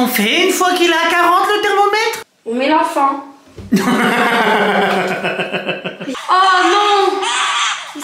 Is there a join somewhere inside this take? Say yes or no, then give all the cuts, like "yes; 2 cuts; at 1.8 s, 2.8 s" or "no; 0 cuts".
yes; 2 cuts; at 2.3 s, 6.0 s